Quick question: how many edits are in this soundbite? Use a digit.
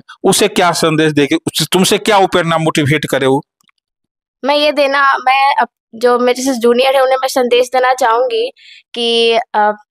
0